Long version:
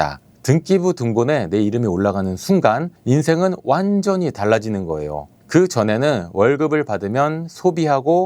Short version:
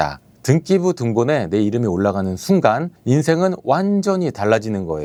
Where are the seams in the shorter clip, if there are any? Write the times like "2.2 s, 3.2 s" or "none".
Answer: none